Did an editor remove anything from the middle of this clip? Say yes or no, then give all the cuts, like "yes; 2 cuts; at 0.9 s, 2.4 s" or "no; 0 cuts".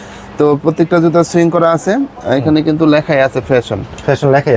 no; 0 cuts